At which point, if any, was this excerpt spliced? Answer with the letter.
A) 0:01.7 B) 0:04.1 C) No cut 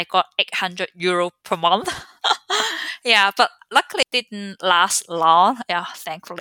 B